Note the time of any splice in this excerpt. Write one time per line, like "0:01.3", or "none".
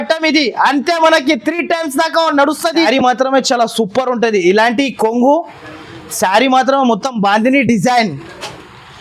0:02.9